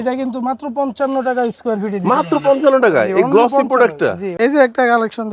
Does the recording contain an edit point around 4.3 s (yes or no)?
yes